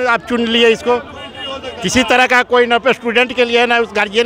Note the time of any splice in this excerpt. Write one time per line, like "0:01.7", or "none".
none

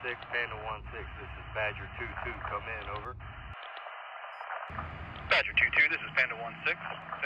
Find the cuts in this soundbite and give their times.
none

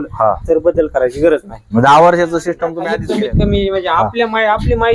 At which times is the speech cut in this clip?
0:02.7

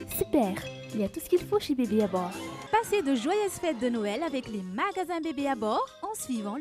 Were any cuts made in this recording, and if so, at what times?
none

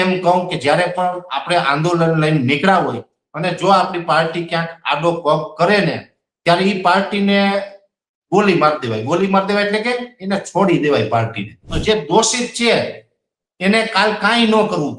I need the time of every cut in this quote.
0:11.7

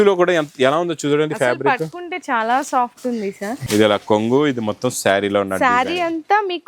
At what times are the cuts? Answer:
0:03.6

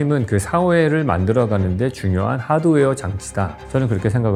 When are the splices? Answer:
none

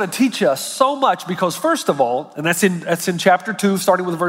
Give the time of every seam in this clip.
none

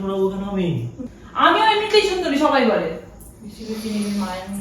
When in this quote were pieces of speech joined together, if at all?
0:00.9

